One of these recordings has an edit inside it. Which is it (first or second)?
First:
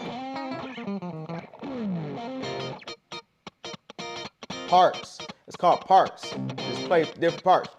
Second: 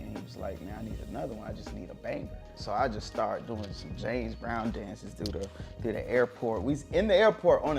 second